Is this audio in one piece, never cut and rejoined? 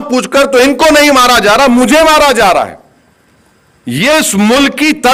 yes; 0 cuts

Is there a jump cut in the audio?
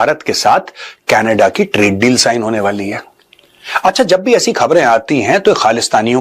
yes; 1 cut; at 1.7 s

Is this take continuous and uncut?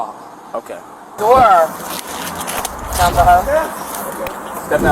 no; 1 cut; at 1.2 s

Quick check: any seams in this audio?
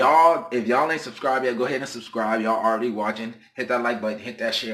no; 0 cuts

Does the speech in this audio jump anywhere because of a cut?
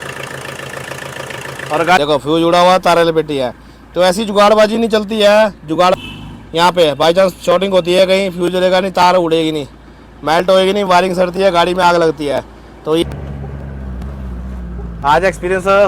yes; 3 cuts; at 2.0 s, 5.9 s, 13.0 s

